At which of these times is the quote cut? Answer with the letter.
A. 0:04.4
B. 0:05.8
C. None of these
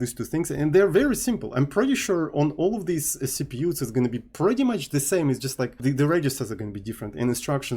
B